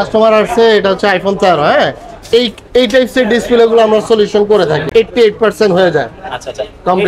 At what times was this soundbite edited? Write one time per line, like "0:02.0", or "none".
none